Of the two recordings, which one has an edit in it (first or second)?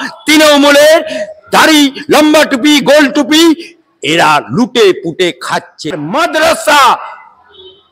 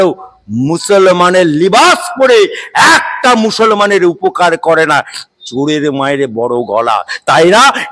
first